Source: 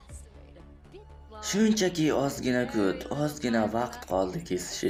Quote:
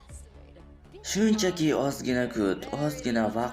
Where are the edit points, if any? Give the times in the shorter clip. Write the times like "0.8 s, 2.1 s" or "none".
1.1 s